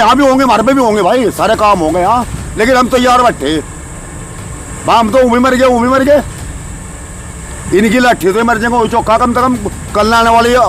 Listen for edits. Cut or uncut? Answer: uncut